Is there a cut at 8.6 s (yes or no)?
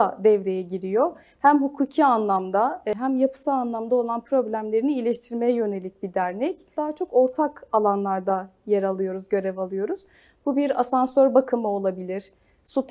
no